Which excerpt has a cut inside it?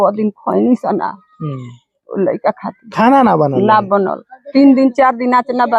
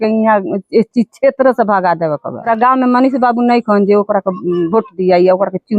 second; 1 cut; at 2.5 s

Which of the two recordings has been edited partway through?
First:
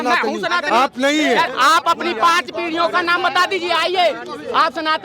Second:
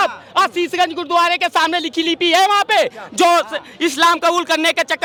first; 1 cut; at 1.5 s

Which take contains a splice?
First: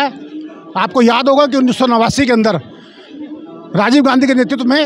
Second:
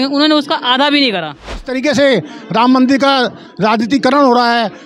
second; 1 cut; at 1.7 s

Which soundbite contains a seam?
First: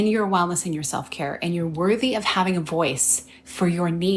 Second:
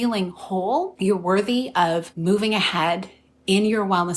second; 2 cuts; at 0.9 s, 2.1 s

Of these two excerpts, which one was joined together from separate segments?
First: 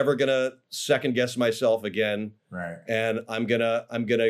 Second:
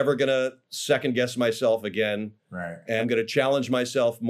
second; 1 cut; at 3.0 s

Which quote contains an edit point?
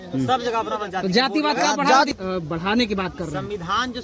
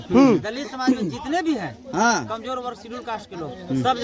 first; 1 cut; at 2.1 s

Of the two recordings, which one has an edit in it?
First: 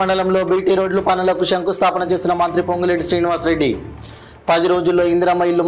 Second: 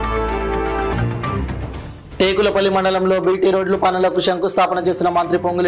second; 1 cut; at 0.9 s

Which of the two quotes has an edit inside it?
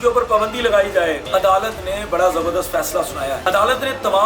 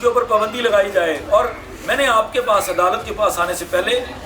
first; 2 cuts; at 1.2 s, 3.4 s

